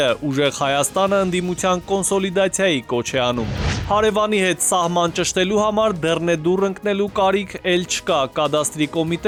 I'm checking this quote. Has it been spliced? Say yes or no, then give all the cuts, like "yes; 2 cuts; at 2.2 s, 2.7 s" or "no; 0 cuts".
no; 0 cuts